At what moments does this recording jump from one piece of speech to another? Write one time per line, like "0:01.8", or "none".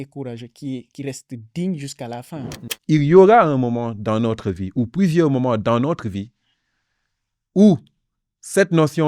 0:02.7